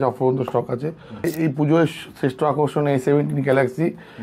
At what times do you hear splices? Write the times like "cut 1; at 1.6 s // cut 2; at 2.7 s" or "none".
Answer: cut 1; at 1.3 s